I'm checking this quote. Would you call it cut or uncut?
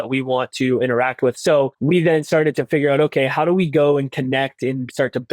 cut